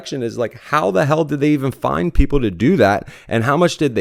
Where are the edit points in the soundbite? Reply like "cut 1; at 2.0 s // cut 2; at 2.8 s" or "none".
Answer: none